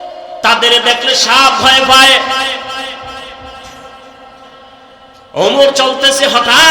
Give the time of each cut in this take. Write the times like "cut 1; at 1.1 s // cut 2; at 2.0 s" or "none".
cut 1; at 5.3 s